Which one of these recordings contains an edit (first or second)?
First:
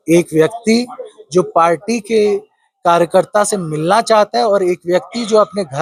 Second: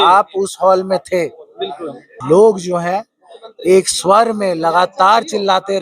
second